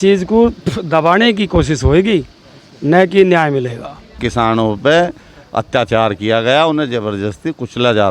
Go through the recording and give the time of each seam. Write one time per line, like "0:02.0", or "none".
0:04.2